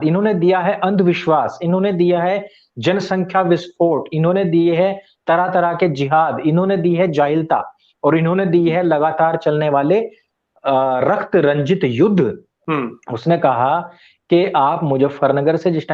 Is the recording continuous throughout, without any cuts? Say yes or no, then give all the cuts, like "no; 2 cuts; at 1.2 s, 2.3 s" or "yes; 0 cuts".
no; 1 cut; at 12.5 s